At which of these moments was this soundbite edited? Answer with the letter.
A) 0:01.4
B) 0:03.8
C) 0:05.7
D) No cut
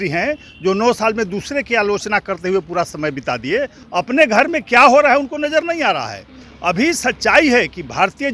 B